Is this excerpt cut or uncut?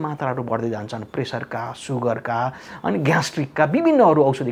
uncut